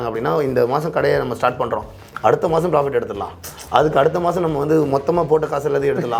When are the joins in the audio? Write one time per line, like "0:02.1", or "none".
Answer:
none